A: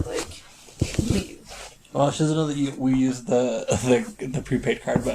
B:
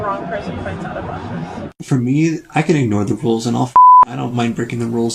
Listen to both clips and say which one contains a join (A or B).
B